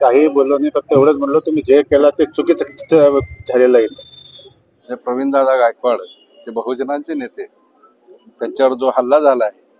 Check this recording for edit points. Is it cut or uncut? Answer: cut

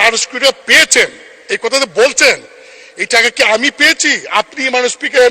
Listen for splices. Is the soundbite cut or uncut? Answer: uncut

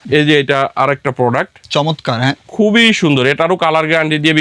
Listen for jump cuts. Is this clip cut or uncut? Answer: uncut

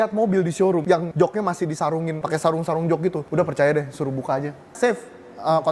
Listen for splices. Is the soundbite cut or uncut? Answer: cut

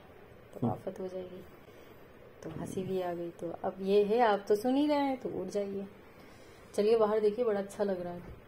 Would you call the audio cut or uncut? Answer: uncut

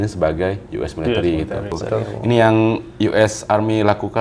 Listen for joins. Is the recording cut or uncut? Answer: cut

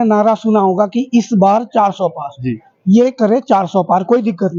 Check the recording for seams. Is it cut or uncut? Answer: uncut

